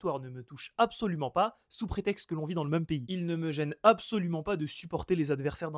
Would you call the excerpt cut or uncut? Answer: cut